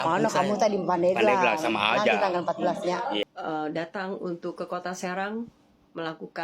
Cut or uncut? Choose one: cut